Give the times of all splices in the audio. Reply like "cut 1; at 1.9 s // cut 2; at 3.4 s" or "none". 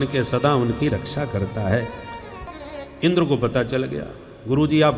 cut 1; at 2.4 s